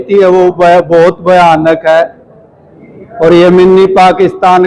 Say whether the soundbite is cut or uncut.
uncut